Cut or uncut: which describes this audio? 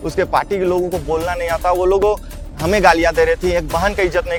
uncut